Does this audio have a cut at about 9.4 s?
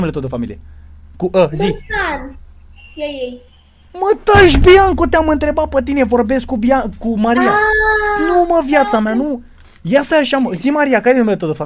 no; 0 cuts

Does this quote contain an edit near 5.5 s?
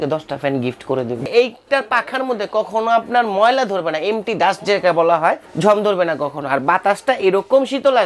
yes; 2 cuts; at 1.3 s, 5.5 s

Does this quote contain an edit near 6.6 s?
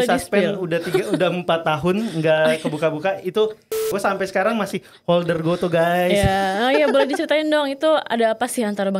no; 1 cut; at 3.9 s

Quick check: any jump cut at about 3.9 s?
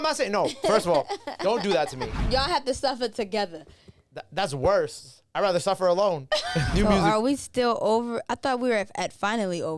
no; 2 cuts; at 2.1 s, 6.7 s

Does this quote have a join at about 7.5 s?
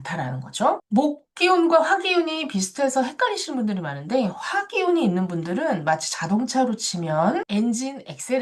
yes; 1 cut; at 7.5 s

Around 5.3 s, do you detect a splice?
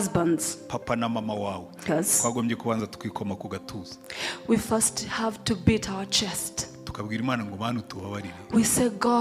no; 1 cut; at 1.9 s

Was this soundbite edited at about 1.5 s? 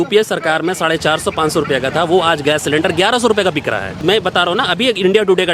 no; 1 cut; at 4.0 s

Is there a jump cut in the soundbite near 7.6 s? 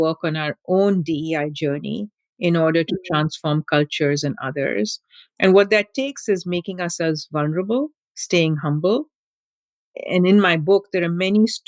no; 1 cut; at 9.6 s

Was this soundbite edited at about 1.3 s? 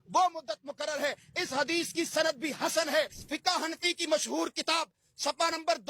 no; 1 cut; at 3.2 s

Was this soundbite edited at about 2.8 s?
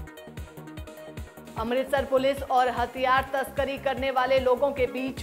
no; 1 cut; at 1.1 s

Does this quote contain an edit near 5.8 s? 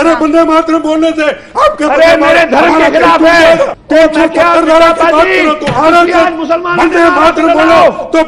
no; 1 cut; at 3.8 s

